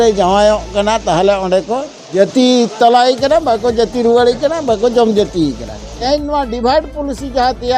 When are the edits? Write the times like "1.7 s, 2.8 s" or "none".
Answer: 2.0 s, 6.0 s